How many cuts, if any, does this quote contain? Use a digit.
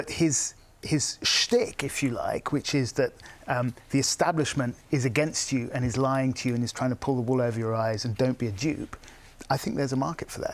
0